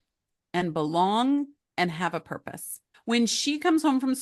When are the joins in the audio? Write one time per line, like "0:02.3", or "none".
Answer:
0:03.0